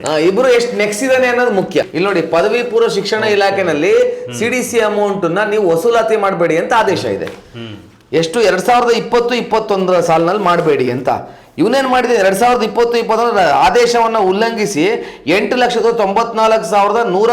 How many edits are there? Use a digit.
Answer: 1